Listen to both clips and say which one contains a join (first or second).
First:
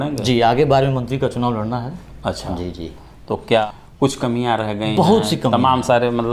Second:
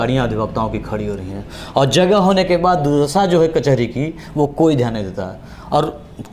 first